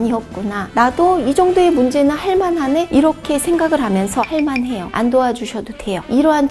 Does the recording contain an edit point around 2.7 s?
no; 1 cut; at 4.2 s

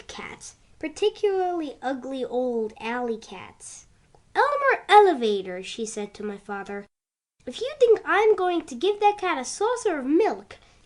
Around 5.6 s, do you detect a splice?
yes; 1 cut; at 5.6 s

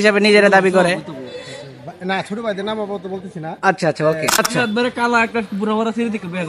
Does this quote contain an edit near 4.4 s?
yes; 1 cut; at 4.4 s

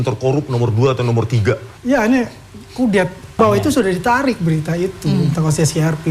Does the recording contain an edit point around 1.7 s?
yes; 2 cuts; at 1.7 s, 3.2 s

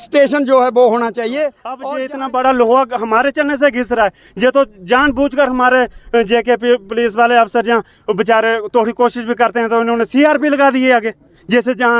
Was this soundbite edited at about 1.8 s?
yes; 1 cut; at 1.8 s

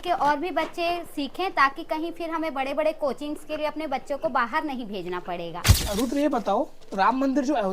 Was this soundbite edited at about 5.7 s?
yes; 1 cut; at 5.7 s

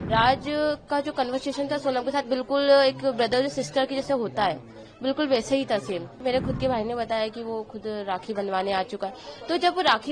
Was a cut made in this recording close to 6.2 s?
yes; 1 cut; at 6.2 s

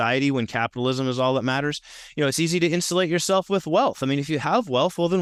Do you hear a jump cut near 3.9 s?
no; 0 cuts

